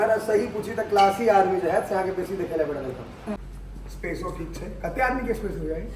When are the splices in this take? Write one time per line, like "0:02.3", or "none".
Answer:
0:03.4